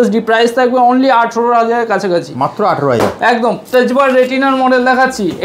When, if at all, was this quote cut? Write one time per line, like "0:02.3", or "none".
0:03.6